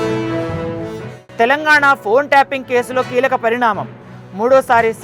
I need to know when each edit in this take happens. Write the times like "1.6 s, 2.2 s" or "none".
0.9 s